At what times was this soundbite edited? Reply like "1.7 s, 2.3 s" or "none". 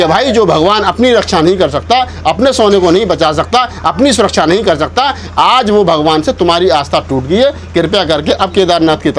none